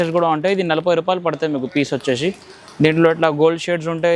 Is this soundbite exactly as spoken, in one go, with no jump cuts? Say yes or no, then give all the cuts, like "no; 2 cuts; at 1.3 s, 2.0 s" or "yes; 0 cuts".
yes; 0 cuts